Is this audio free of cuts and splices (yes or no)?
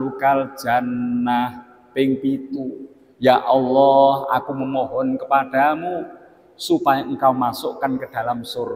yes